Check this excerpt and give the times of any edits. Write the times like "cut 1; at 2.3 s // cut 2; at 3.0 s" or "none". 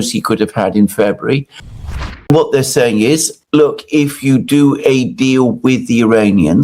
cut 1; at 1.7 s // cut 2; at 3.3 s